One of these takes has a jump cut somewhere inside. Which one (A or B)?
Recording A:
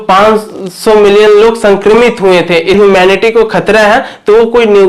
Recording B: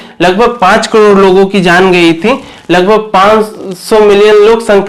A